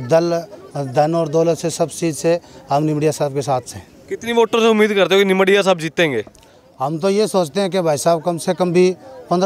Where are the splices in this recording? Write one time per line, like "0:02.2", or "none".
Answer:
none